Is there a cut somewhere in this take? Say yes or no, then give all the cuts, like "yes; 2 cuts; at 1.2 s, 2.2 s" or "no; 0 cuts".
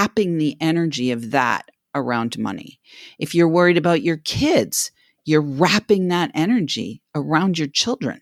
no; 0 cuts